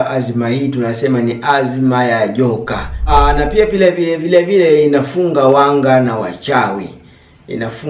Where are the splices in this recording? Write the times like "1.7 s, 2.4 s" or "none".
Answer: 3.1 s